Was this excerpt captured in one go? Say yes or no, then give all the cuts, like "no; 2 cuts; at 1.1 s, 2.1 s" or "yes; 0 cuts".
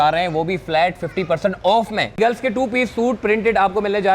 no; 1 cut; at 2.2 s